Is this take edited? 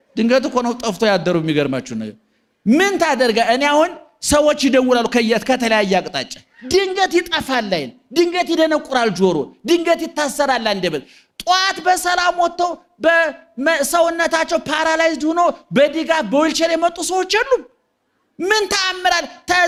no; 0 cuts

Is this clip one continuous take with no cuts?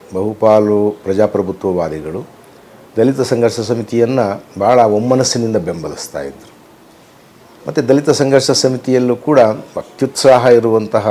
yes; 0 cuts

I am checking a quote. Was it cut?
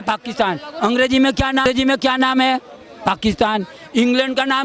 yes; 1 cut; at 1.7 s

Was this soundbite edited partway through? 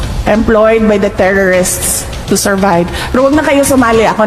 no; 0 cuts

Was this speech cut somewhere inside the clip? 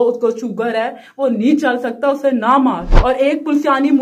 yes; 1 cut; at 2.9 s

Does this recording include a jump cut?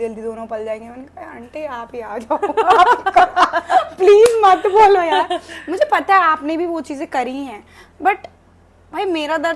no; 0 cuts

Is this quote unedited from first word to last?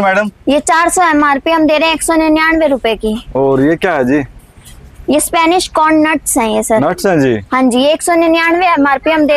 yes; 0 cuts

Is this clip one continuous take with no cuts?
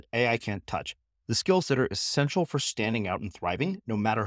yes; 0 cuts

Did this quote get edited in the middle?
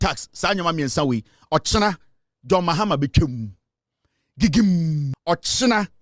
yes; 1 cut; at 5.1 s

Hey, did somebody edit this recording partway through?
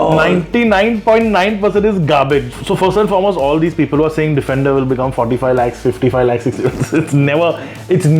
yes; 1 cut; at 2.6 s

